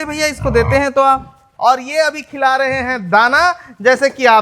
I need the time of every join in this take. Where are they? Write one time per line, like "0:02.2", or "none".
0:01.5